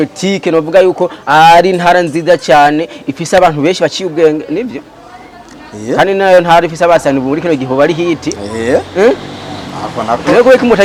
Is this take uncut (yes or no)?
yes